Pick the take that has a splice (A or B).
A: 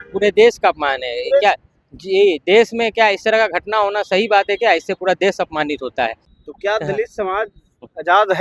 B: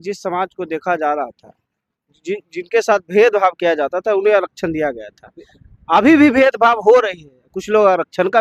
A